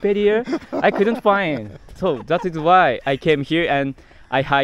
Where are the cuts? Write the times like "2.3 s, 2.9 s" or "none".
1.8 s